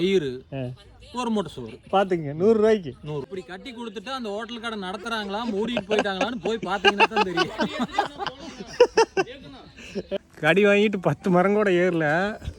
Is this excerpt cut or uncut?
cut